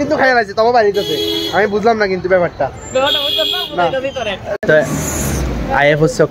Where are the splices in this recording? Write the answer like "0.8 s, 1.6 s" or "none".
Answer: 4.6 s